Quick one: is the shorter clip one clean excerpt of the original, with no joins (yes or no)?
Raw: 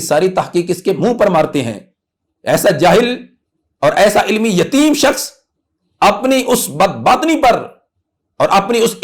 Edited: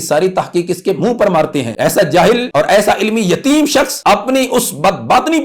no